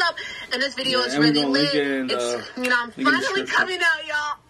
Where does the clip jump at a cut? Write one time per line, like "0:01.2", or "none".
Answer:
none